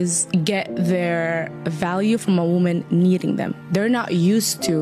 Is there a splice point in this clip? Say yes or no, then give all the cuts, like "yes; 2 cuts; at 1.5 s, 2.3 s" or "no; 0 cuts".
yes; 1 cut; at 3.6 s